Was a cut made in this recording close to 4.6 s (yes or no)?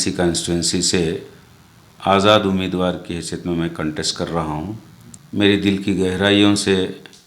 yes